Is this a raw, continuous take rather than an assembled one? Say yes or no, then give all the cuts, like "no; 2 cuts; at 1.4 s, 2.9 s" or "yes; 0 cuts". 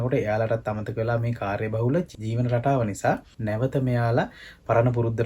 no; 2 cuts; at 2.1 s, 3.3 s